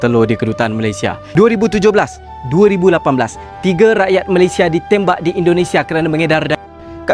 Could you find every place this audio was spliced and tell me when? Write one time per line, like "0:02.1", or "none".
0:01.2